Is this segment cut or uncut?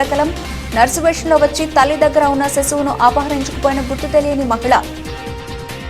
cut